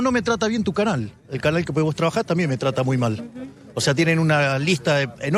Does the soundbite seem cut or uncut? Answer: uncut